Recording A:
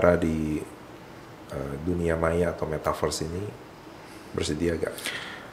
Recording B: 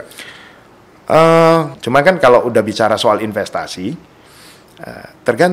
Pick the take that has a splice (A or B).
B